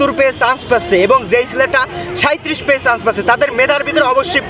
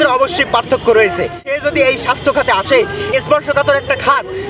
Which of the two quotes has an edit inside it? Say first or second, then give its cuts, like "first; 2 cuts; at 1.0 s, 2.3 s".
second; 2 cuts; at 1.5 s, 3.1 s